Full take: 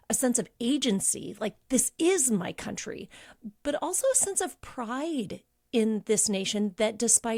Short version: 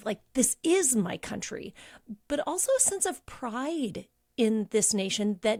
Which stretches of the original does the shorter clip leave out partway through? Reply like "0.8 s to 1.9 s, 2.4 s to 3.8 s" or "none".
none

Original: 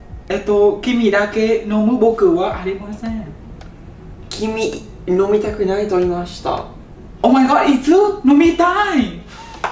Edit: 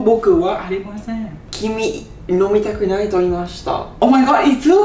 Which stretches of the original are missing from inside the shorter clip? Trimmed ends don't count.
3.4 s to 4.2 s, 6.6 s to 7.1 s

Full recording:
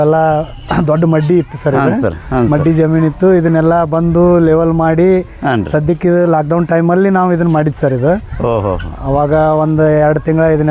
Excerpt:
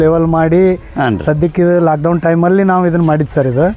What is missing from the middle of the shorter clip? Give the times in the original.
none

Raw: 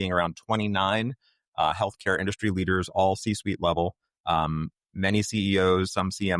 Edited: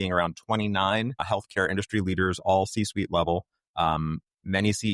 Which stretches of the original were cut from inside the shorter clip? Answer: 1.2 s to 1.7 s

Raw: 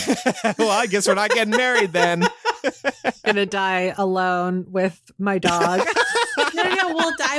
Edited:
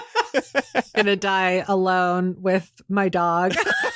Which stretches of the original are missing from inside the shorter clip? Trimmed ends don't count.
none

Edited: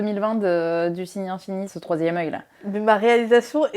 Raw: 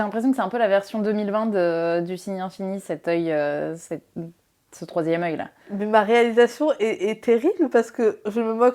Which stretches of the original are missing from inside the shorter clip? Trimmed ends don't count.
2.8 s to 4.8 s

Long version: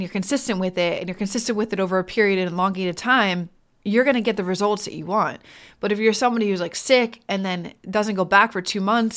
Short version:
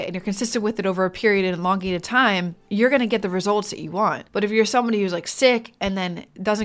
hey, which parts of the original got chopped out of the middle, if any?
3.5 s to 3.7 s, 5.4 s to 5.7 s

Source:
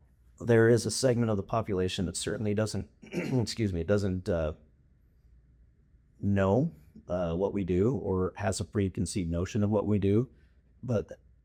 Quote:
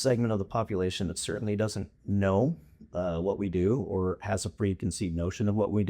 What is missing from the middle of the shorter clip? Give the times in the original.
2.9 s to 6.1 s

